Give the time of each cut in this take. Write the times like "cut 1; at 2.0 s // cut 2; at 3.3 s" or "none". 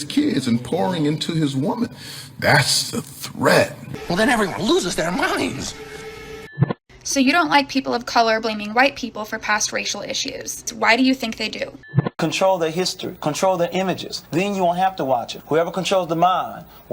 cut 1; at 3.9 s // cut 2; at 6.5 s // cut 3; at 10.7 s // cut 4; at 12.0 s